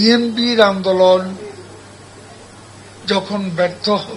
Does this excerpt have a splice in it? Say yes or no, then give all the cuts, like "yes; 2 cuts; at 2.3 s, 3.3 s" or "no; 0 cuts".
no; 0 cuts